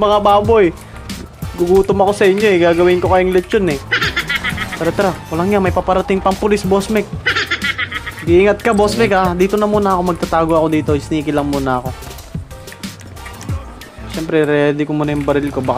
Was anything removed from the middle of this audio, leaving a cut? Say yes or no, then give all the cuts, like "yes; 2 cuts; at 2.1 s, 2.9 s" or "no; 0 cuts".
no; 0 cuts